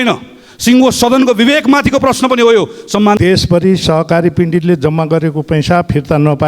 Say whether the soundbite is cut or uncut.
cut